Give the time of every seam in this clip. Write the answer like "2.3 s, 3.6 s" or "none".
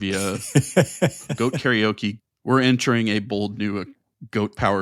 1.1 s, 2.2 s